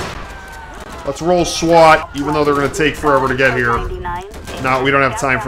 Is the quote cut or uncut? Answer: cut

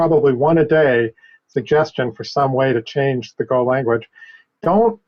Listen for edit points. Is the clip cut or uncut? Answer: uncut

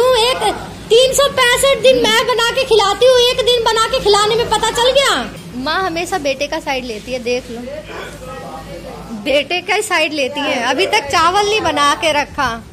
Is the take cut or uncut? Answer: uncut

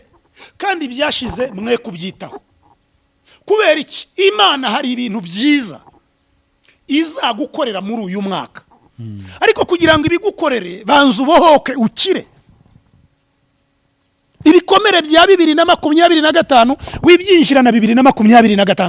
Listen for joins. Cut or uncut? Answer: uncut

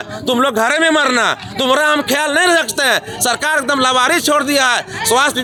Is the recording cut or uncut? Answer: uncut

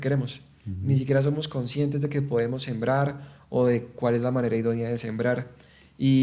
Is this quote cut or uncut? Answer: uncut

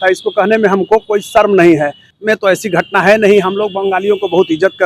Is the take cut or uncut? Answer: cut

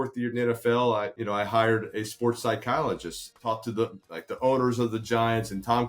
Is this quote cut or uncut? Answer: cut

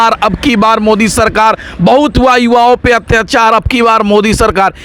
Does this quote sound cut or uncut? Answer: uncut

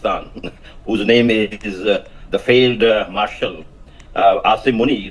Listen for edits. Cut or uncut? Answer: uncut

